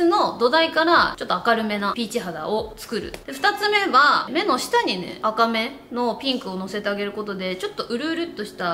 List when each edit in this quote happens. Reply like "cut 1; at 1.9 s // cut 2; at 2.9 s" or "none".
cut 1; at 1.2 s // cut 2; at 3.1 s // cut 3; at 4.2 s